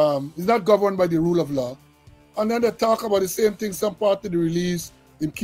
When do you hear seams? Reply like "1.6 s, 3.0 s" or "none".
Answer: none